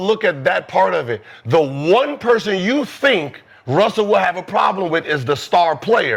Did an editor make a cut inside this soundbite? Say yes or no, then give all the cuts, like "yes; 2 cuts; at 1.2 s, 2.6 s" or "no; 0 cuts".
no; 0 cuts